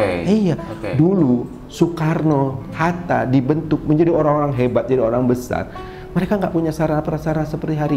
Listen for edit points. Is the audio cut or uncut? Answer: uncut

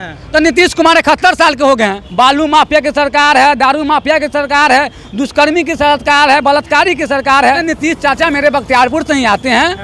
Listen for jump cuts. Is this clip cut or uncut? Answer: cut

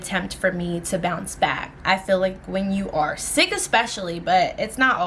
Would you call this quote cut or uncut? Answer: uncut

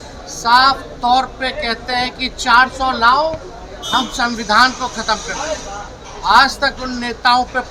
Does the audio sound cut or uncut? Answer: uncut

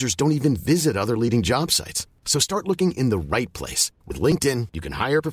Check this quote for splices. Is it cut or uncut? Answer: uncut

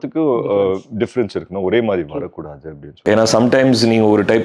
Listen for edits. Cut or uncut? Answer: cut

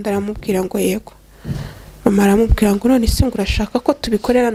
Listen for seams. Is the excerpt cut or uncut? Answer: uncut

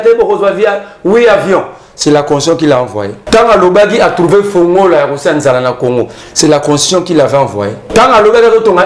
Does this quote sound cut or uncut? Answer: cut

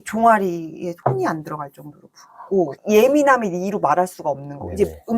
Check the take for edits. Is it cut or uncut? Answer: cut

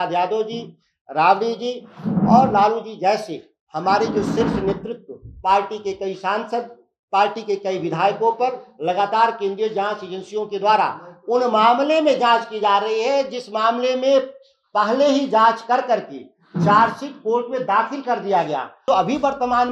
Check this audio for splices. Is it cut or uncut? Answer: cut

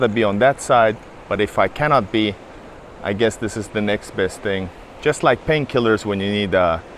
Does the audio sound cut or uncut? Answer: cut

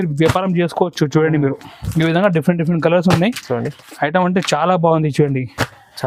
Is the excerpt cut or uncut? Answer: uncut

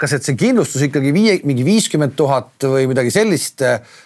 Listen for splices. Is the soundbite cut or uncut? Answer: uncut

